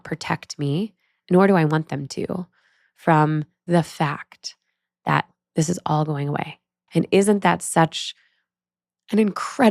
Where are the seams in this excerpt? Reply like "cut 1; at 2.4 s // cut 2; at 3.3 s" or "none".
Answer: cut 1; at 3.6 s // cut 2; at 5.3 s // cut 3; at 6.8 s